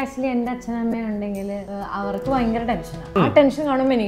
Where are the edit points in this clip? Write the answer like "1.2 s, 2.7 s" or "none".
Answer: 1.7 s, 3.2 s